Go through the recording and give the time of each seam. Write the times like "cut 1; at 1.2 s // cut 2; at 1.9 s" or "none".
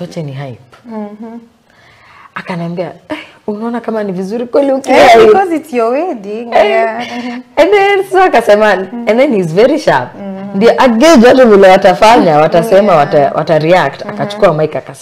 none